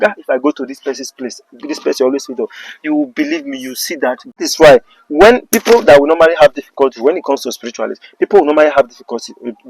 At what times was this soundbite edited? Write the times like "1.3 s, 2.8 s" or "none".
4.4 s